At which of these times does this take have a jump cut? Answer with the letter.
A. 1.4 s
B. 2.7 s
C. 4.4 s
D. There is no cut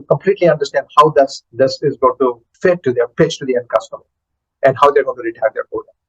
B